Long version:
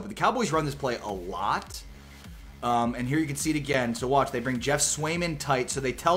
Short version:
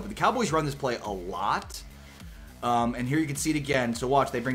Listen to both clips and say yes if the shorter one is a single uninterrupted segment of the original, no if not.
yes